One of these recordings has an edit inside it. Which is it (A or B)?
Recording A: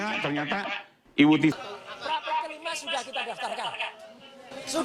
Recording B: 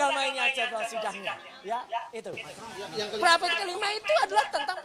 A